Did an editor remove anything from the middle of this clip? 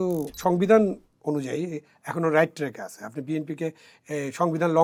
no; 0 cuts

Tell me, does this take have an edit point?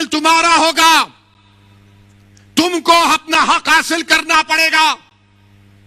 no; 0 cuts

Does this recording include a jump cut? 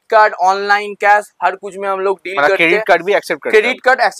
no; 0 cuts

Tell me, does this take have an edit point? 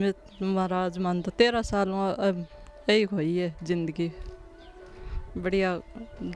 no; 0 cuts

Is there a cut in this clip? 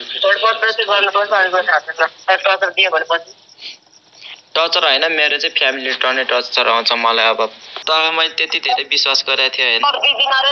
yes; 1 cut; at 7.7 s

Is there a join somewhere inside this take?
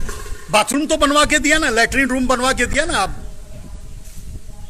no; 0 cuts

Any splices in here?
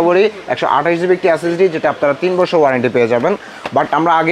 no; 0 cuts

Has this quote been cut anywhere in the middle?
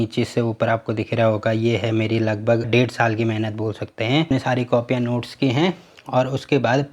yes; 2 cuts; at 2.7 s, 4.3 s

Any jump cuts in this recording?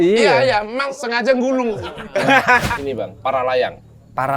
yes; 3 cuts; at 0.9 s, 2.0 s, 2.7 s

